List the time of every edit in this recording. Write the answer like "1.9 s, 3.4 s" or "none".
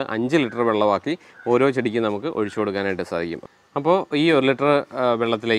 3.4 s